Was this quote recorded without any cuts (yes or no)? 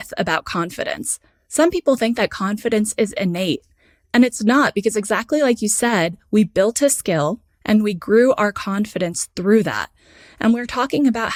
yes